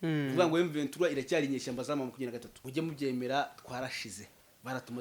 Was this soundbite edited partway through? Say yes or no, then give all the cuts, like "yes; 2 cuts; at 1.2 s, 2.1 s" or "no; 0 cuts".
yes; 1 cut; at 2.5 s